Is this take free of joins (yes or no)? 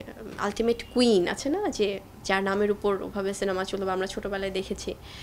yes